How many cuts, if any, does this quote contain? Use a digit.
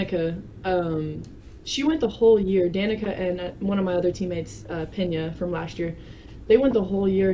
0